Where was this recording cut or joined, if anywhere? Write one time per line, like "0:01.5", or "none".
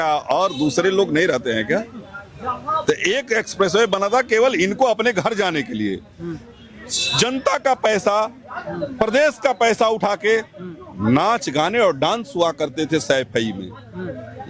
none